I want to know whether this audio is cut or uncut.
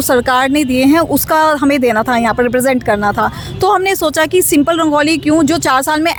uncut